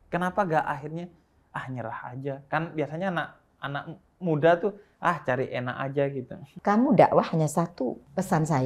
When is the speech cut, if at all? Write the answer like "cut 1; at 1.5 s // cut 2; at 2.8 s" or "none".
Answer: cut 1; at 6.5 s